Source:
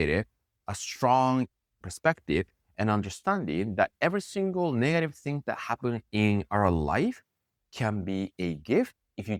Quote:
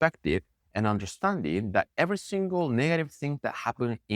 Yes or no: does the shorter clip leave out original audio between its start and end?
no